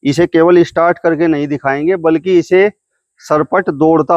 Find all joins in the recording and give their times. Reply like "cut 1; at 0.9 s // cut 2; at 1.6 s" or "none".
none